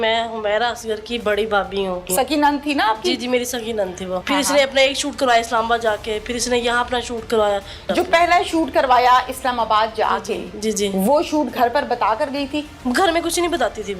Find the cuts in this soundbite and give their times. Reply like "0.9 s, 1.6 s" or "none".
2.0 s, 4.2 s, 7.8 s, 12.8 s